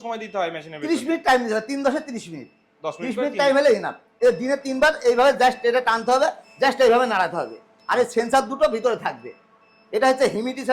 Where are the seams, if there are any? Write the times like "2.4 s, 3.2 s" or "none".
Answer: 4.0 s

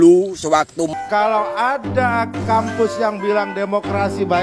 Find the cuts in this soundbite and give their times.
0.9 s

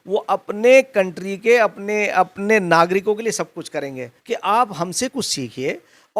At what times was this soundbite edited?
4.1 s

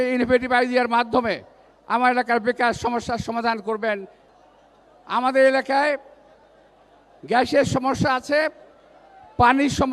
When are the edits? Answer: 4.2 s

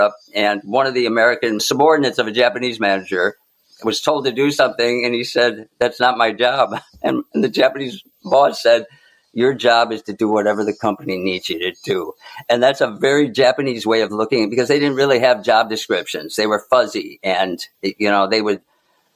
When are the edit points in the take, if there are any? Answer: 1.6 s

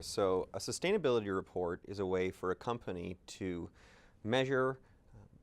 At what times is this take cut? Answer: 3.0 s

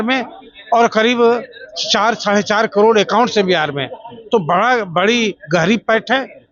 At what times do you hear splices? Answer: none

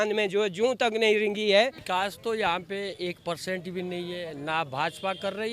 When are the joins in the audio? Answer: 1.8 s

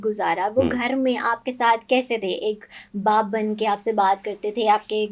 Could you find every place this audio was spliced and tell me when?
none

